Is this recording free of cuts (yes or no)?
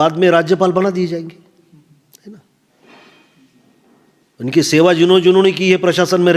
yes